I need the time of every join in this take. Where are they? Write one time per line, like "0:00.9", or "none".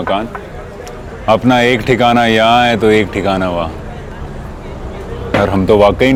none